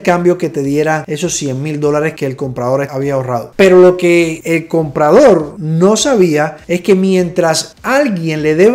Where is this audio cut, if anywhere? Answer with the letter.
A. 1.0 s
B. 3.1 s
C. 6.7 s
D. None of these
D